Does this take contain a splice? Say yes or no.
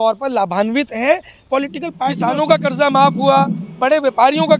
yes